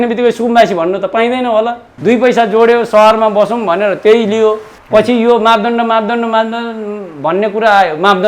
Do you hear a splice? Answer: yes; 1 cut; at 1.8 s

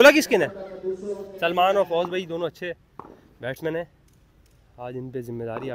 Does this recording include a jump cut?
no; 0 cuts

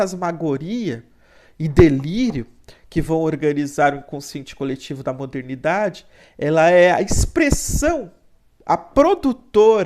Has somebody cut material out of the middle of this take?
no; 0 cuts

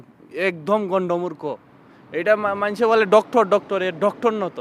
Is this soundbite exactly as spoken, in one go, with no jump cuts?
yes; 0 cuts

